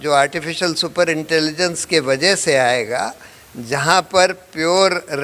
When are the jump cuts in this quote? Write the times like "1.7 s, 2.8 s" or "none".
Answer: none